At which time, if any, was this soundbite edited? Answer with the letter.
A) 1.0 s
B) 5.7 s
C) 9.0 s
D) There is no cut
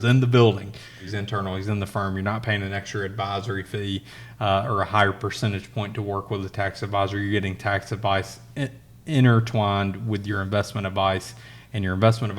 A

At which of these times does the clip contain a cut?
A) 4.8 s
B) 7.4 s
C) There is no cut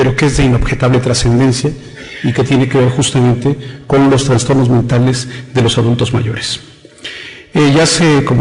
A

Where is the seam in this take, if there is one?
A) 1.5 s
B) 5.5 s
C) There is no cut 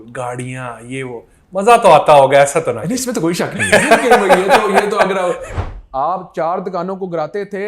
B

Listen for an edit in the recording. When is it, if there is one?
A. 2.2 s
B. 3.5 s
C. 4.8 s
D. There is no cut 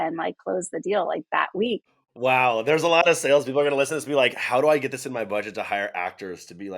A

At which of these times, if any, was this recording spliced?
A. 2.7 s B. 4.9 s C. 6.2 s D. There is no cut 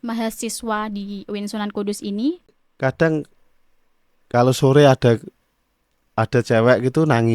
A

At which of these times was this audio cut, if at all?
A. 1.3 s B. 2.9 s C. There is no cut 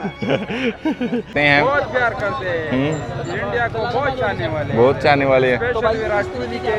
A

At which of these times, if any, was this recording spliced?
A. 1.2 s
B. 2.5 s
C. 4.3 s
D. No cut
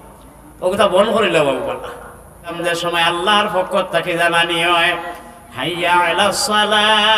B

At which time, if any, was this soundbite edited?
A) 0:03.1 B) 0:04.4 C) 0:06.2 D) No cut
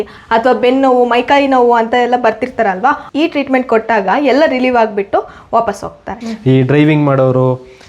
C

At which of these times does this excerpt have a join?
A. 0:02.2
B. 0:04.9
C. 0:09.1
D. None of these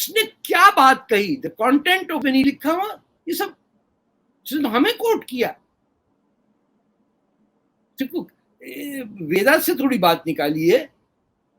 A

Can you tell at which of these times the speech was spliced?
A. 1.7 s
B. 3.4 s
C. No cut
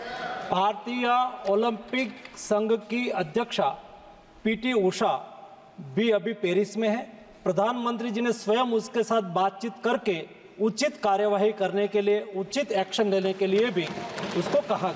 C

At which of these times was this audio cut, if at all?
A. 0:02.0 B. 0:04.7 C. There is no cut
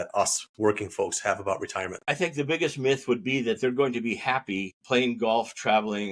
A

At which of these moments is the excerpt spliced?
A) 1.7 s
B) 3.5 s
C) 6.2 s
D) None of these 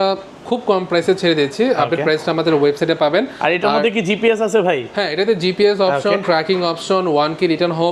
D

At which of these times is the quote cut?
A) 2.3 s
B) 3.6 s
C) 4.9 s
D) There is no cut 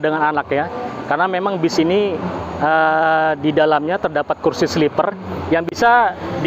D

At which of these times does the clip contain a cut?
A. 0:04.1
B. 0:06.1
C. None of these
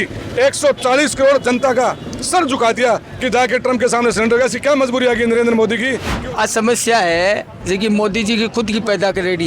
B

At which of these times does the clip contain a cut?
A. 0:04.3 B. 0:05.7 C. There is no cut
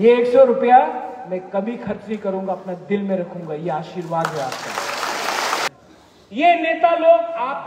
B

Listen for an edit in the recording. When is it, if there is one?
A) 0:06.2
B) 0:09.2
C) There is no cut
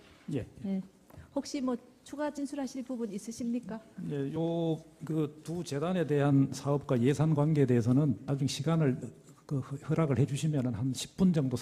A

